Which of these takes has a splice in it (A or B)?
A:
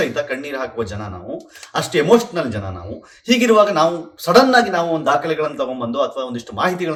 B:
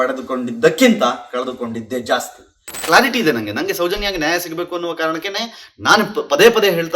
B